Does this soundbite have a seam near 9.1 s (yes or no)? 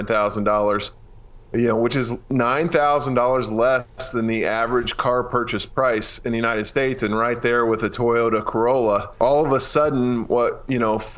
yes